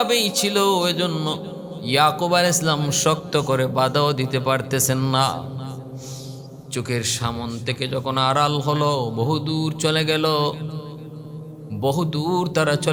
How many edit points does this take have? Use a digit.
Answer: 0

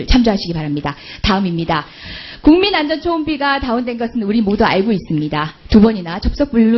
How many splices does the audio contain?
0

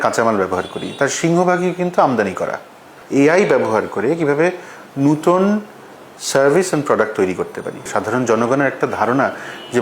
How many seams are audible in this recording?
2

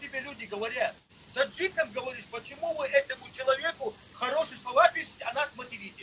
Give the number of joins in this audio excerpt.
1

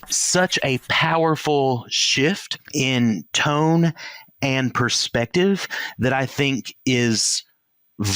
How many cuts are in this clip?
1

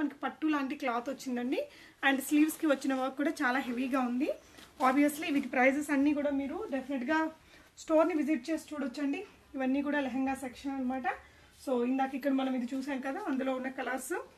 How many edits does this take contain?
0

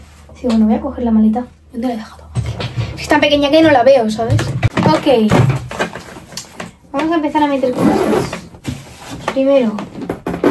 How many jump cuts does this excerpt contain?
0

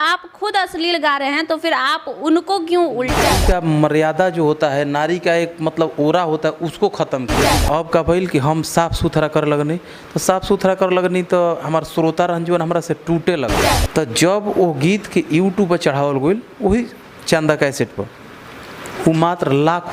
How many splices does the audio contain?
3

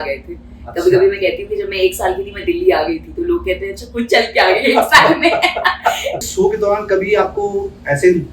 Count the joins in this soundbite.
1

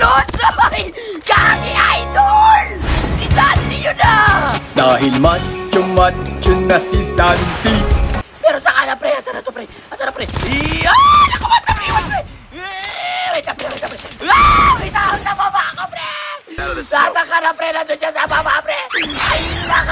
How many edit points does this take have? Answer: 2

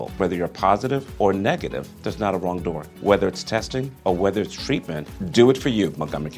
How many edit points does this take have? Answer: 0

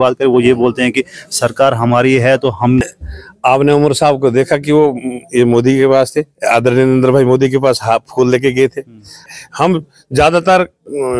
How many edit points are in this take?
2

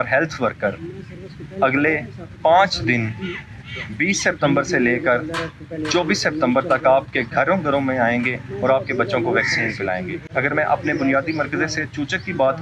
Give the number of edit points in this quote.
0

